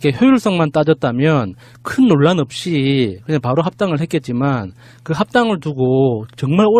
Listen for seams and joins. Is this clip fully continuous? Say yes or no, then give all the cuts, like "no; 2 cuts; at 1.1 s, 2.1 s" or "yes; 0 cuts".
no; 1 cut; at 5.2 s